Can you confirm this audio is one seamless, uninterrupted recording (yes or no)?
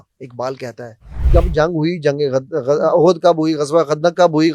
no